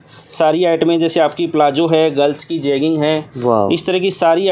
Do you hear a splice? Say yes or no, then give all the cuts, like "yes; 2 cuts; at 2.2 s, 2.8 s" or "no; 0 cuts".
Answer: no; 0 cuts